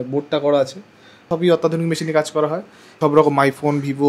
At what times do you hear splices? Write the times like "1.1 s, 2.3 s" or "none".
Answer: 1.3 s, 2.9 s